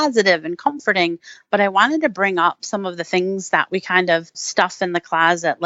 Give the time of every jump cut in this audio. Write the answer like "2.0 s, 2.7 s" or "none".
4.4 s